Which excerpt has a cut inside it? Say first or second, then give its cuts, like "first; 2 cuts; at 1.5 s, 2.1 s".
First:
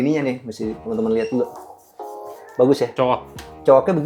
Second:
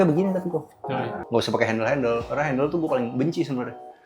second; 1 cut; at 1.1 s